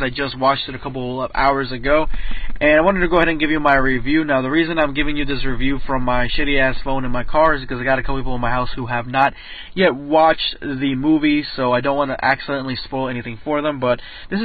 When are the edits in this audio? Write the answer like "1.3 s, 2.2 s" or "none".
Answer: 5.0 s